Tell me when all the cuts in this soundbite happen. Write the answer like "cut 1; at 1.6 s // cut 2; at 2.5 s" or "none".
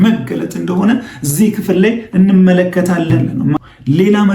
cut 1; at 3.3 s